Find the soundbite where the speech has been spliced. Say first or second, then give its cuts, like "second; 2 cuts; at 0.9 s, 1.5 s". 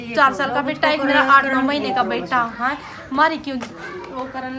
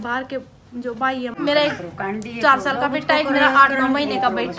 second; 1 cut; at 1.3 s